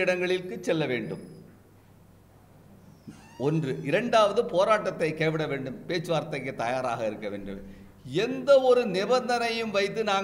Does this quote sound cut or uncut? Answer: uncut